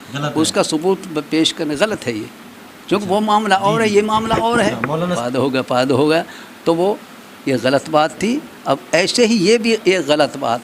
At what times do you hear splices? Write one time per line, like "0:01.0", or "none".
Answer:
0:05.2